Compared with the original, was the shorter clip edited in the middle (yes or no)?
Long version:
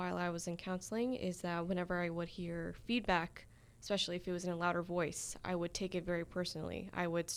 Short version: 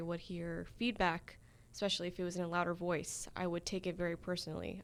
no